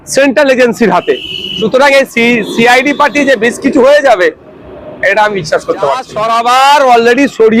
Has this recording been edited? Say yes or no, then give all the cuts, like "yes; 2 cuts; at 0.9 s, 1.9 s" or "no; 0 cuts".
yes; 2 cuts; at 1.5 s, 6.1 s